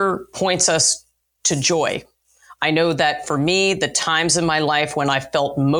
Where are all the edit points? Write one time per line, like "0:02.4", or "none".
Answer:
none